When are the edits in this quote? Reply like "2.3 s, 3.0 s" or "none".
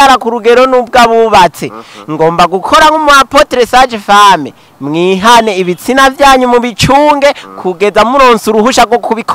none